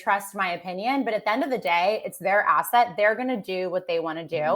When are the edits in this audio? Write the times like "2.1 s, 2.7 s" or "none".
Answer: none